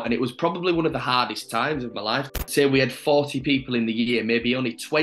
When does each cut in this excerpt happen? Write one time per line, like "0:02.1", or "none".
0:02.4